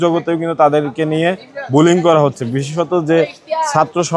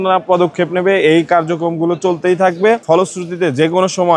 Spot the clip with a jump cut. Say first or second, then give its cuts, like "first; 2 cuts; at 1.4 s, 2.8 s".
second; 1 cut; at 2.8 s